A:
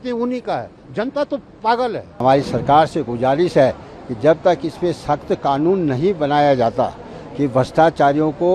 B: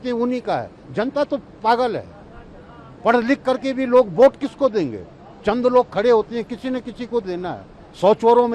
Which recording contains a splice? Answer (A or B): A